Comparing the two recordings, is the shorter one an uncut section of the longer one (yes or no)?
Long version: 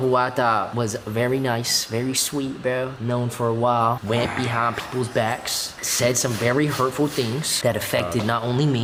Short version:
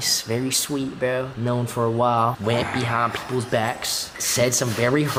yes